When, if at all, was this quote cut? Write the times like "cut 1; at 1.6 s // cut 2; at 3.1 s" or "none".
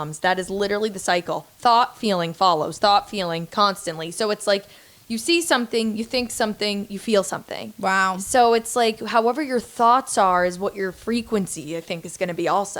none